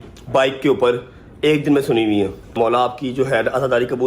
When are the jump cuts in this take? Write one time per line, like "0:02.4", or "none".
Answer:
0:02.5